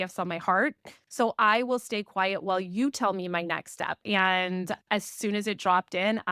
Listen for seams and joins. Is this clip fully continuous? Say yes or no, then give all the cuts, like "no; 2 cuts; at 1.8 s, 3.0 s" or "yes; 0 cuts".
no; 1 cut; at 4.0 s